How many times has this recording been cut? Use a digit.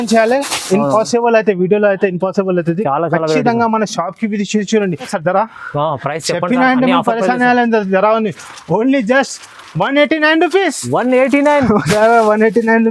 1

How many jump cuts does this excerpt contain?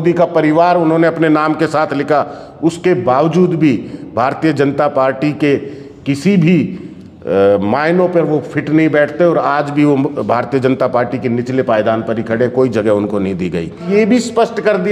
1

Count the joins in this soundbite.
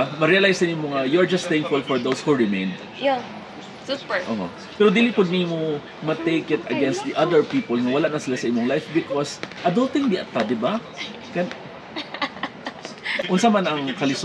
1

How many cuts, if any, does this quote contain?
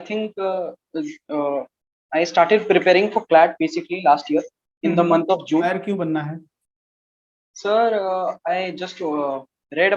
1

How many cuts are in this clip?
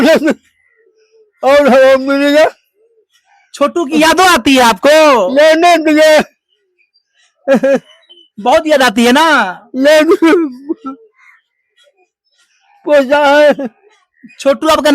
0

